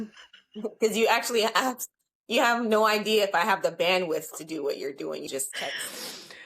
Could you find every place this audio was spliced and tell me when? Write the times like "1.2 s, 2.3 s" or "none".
5.3 s